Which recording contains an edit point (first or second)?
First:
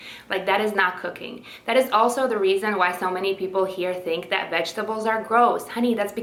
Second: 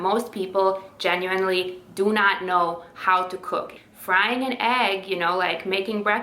second